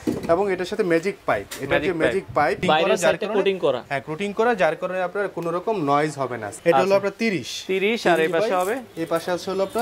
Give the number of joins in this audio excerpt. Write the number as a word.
two